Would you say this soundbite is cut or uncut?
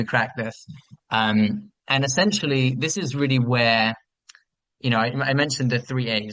uncut